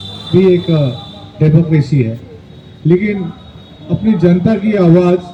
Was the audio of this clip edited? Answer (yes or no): no